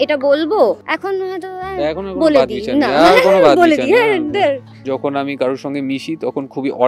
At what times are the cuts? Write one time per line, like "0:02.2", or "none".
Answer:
0:00.9
0:04.8